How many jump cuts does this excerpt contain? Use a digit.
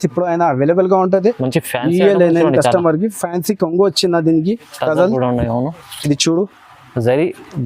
1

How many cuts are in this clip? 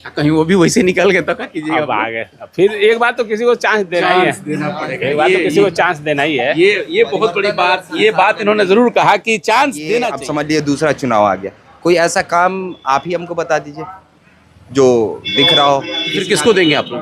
1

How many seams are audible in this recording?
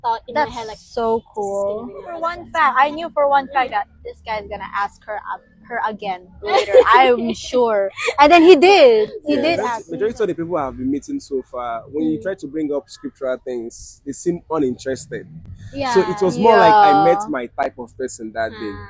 2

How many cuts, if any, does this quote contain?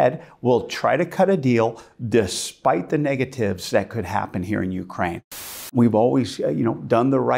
1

